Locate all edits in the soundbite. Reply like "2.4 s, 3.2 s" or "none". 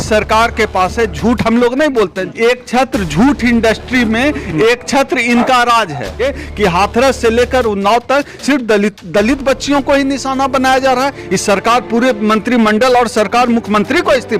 2.2 s, 6.4 s